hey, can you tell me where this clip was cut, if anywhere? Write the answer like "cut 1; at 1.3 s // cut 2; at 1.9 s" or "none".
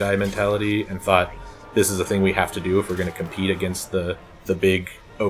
cut 1; at 4.3 s